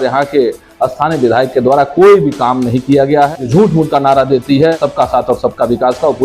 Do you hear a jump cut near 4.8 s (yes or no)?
yes